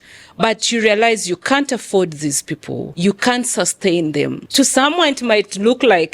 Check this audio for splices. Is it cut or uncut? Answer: cut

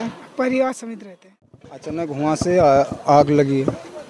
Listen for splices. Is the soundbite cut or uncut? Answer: cut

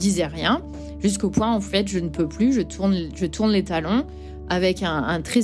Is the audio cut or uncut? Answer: uncut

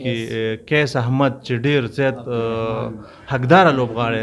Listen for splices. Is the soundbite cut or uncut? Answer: uncut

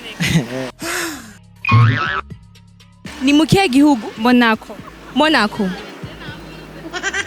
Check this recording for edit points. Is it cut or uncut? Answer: cut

